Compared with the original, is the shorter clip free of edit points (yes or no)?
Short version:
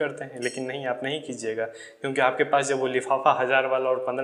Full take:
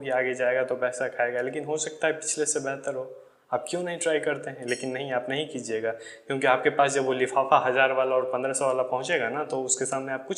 yes